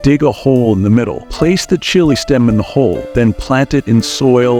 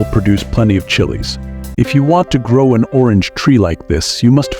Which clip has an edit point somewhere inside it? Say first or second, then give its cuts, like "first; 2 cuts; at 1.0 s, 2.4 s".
second; 1 cut; at 1.5 s